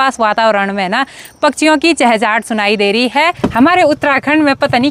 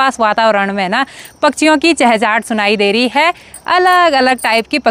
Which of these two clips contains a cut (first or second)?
first